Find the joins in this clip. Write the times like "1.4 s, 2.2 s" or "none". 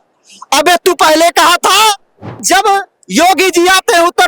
2.4 s